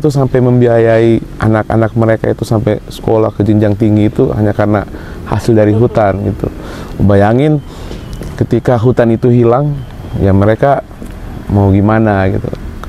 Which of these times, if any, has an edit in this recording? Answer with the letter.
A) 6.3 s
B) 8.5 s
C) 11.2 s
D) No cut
D